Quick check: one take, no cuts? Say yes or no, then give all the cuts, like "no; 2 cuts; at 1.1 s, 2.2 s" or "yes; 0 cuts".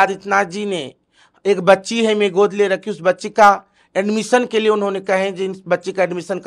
yes; 0 cuts